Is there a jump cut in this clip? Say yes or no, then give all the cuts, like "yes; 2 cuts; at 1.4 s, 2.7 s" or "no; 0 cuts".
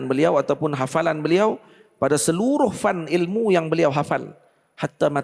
no; 0 cuts